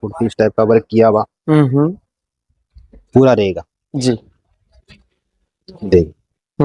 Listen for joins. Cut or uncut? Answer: uncut